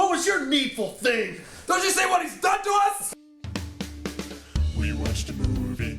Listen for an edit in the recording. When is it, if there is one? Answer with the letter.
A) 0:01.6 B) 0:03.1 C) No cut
B